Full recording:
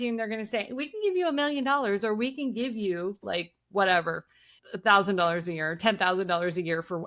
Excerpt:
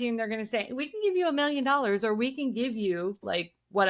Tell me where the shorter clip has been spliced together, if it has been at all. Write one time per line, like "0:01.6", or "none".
none